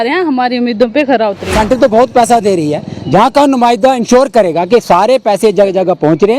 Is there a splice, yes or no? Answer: yes